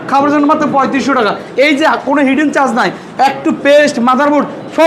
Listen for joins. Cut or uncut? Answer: uncut